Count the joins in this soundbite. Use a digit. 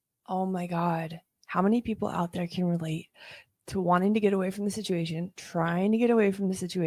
0